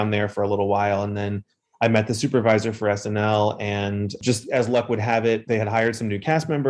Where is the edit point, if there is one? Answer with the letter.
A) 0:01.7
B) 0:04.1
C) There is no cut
B